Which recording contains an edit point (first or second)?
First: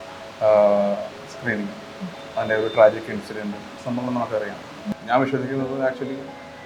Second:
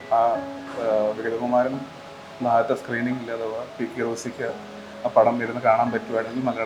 first